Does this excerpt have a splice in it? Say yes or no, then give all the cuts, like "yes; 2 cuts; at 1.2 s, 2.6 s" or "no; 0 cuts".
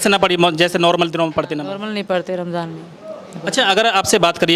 no; 0 cuts